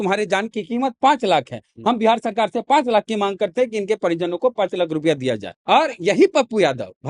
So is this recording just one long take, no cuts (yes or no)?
no